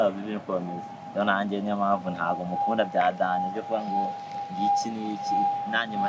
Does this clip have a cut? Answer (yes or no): no